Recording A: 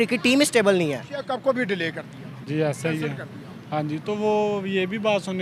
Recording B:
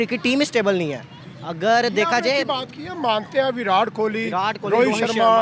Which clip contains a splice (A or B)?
A